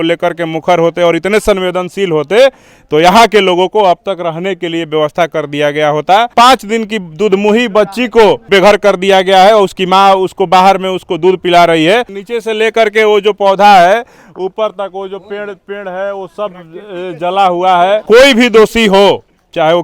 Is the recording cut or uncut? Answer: cut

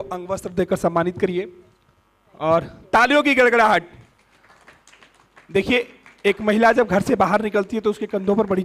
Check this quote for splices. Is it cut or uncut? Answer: uncut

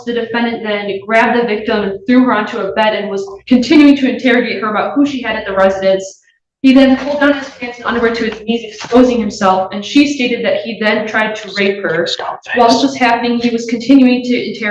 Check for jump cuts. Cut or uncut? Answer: uncut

